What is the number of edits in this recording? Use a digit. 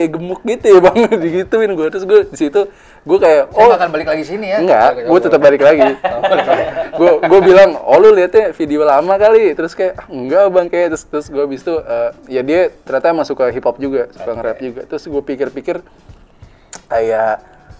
0